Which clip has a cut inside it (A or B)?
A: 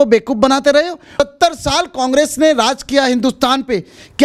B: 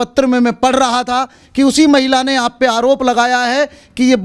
A